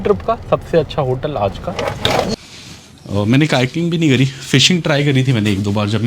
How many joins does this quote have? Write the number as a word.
one